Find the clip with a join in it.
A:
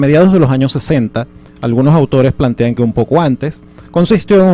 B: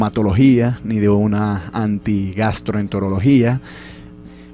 A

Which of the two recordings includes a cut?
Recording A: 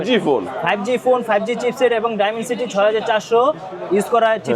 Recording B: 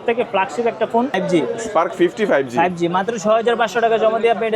B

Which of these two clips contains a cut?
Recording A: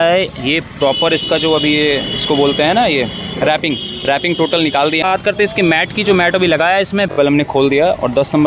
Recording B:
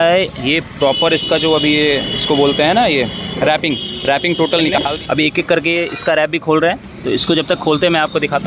A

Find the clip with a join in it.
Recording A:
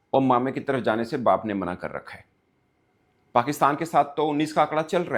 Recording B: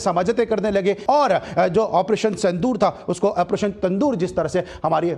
B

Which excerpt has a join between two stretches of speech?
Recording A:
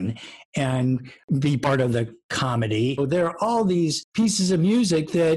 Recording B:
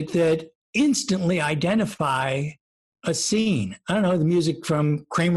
A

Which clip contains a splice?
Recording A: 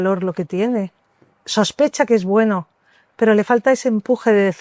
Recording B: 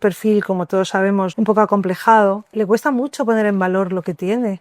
B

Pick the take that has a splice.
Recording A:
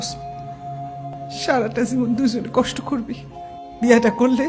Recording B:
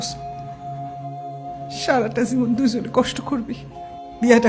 A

